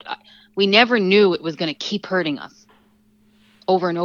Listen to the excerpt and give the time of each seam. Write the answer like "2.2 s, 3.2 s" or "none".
none